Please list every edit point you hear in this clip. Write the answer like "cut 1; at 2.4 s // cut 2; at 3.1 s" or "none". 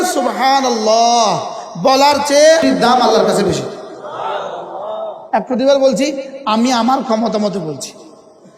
cut 1; at 2.6 s // cut 2; at 5.2 s